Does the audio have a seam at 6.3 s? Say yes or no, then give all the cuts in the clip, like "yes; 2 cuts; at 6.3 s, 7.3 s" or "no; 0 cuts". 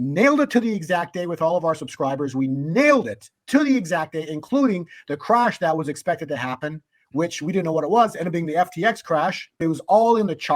no; 1 cut; at 9.6 s